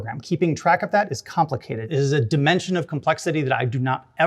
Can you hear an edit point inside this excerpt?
yes; 1 cut; at 1.7 s

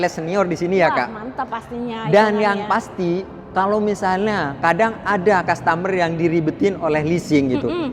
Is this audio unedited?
yes; 0 cuts

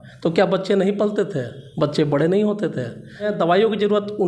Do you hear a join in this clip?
yes; 1 cut; at 3.3 s

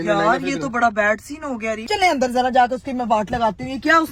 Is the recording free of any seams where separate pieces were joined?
no; 1 cut; at 1.8 s

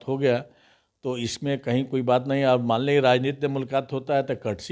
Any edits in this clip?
no; 0 cuts

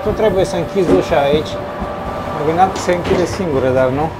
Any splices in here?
yes; 1 cut; at 2.3 s

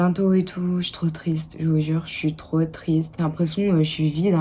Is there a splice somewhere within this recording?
yes; 1 cut; at 3.1 s

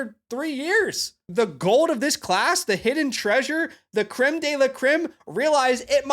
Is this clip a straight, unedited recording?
no; 1 cut; at 1.2 s

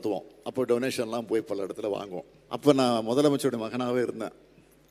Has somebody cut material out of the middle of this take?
yes; 1 cut; at 2.3 s

